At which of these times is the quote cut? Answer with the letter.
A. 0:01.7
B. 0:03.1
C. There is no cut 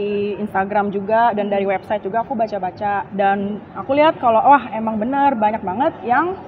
B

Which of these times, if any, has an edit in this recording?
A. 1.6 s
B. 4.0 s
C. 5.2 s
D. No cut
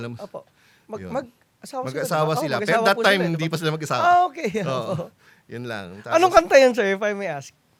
D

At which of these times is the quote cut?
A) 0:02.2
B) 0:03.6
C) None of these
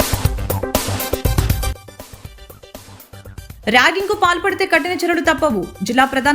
B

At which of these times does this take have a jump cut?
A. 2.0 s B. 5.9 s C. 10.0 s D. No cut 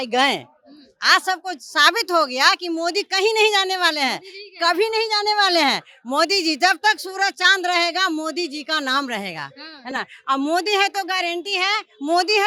D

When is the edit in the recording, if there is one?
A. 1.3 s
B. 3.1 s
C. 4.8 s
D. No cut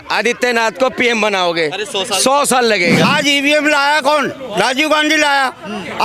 B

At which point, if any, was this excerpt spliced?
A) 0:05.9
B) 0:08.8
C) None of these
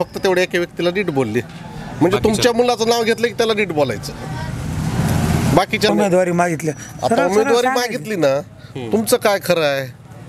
A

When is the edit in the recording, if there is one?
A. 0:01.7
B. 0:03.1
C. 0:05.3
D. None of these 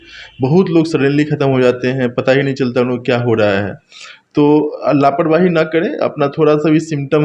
D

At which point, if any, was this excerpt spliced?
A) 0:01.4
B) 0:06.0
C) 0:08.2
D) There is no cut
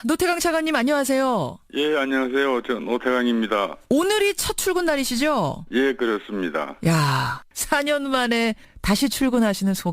B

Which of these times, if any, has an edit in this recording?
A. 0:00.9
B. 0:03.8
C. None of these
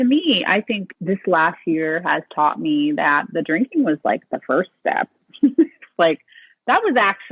A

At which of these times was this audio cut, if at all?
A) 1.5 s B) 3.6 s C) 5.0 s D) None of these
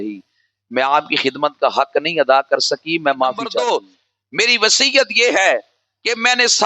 B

